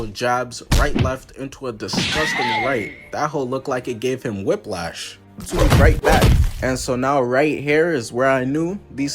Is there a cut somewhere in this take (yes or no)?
yes